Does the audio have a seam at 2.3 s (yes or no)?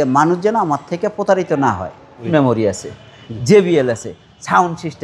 yes